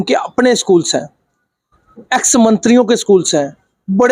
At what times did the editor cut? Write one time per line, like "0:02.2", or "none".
none